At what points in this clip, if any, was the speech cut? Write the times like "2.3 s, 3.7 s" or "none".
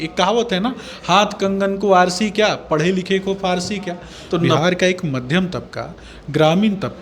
4.6 s